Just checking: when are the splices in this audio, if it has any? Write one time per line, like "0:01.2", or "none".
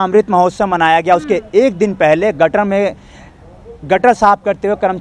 none